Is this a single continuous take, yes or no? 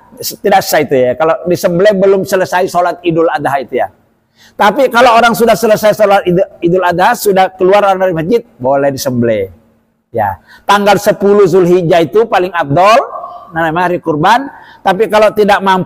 yes